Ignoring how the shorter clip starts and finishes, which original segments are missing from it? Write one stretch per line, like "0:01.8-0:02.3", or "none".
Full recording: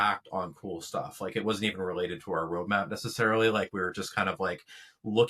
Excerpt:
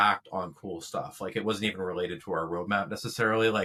none